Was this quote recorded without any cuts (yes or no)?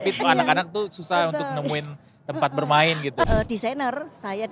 no